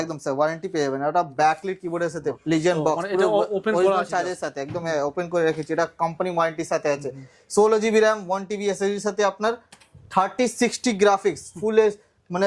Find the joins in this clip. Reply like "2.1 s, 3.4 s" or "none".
2.4 s